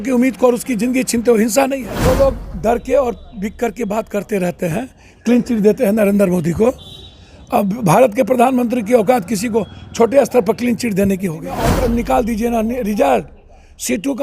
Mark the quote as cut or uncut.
cut